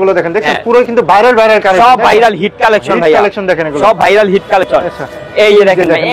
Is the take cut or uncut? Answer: uncut